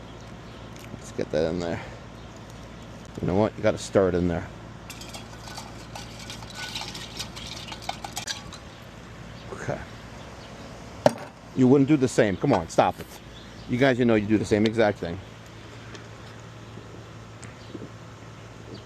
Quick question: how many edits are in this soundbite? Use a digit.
2